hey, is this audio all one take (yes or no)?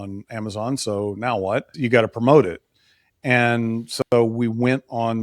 no